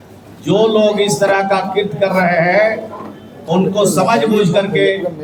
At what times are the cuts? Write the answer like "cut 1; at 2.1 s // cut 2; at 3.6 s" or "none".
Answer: none

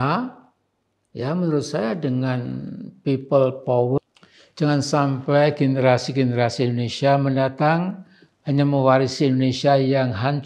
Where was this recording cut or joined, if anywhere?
cut 1; at 4.0 s

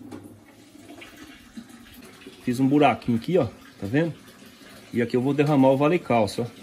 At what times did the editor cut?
cut 1; at 1.9 s

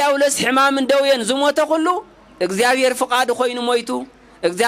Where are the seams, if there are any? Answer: none

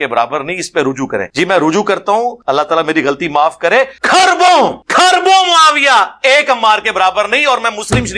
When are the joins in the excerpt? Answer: cut 1; at 1.3 s // cut 2; at 2.4 s // cut 3; at 4.0 s // cut 4; at 4.8 s

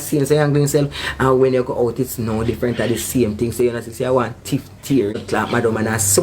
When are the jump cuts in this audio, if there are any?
cut 1; at 5.2 s

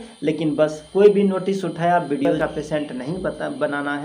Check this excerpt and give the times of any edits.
cut 1; at 2.3 s

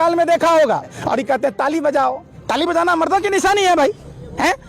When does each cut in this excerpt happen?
cut 1; at 1.0 s

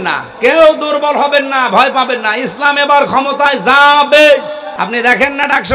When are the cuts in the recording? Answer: cut 1; at 4.7 s

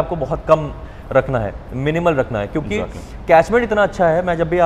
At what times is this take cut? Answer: none

